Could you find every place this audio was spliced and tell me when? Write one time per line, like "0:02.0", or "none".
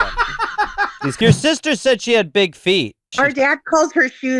0:01.1
0:03.1